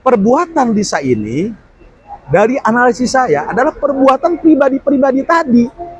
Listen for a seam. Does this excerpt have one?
no; 0 cuts

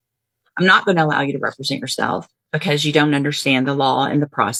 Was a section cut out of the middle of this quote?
no; 0 cuts

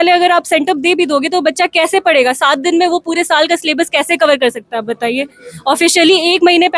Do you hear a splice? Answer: no; 0 cuts

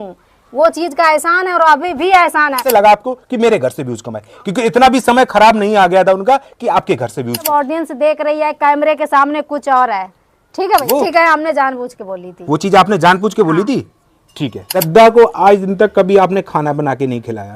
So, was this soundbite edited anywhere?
yes; 4 cuts; at 2.7 s, 7.5 s, 10.8 s, 14.8 s

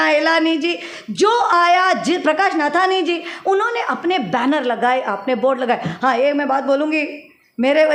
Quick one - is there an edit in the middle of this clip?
no; 0 cuts

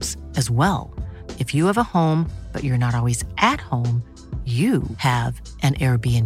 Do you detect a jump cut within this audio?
no; 0 cuts

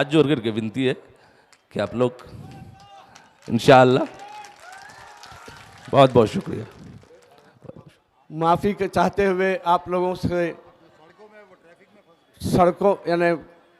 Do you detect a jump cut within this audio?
yes; 1 cut; at 8.0 s

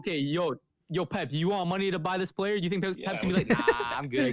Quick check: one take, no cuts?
yes; 0 cuts

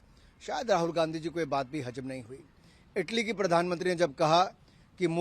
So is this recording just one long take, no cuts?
yes; 0 cuts

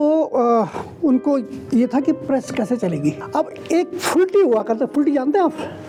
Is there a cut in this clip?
no; 0 cuts

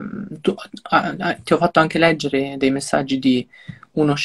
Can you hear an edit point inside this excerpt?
no; 0 cuts

